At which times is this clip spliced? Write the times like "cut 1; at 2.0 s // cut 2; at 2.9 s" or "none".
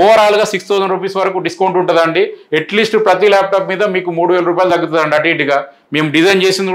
none